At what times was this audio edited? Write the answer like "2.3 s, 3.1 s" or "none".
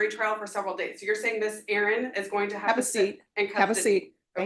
none